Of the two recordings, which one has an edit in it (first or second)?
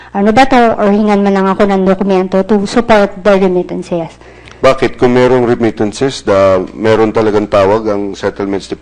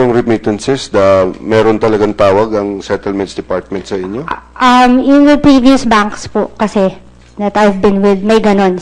first